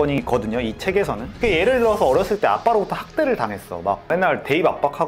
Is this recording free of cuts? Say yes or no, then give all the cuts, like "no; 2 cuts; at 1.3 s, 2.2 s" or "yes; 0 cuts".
no; 1 cut; at 1.3 s